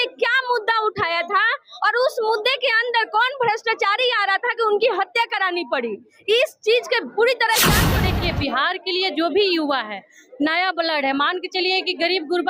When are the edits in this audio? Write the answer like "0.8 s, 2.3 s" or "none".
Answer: 7.9 s